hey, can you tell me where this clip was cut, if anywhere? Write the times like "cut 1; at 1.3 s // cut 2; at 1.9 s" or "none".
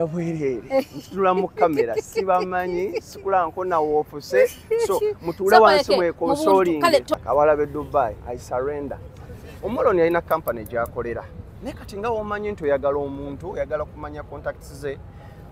cut 1; at 7.1 s